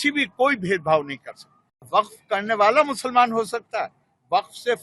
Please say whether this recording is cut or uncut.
cut